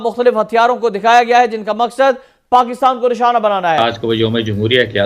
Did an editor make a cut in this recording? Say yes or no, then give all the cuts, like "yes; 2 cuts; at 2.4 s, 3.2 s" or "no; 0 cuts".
yes; 1 cut; at 3.8 s